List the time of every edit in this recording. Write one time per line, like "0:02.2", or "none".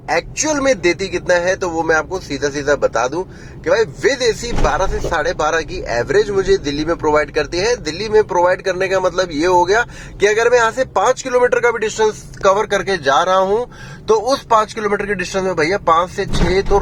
none